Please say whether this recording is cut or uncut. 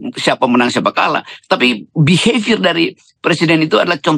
uncut